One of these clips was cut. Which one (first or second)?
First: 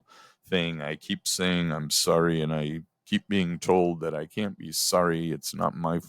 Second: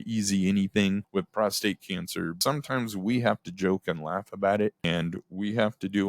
second